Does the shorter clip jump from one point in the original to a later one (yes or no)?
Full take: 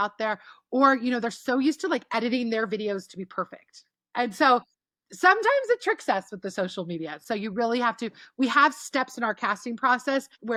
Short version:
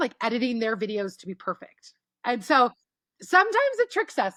no